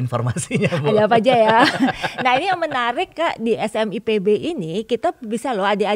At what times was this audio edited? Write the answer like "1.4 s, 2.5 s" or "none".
none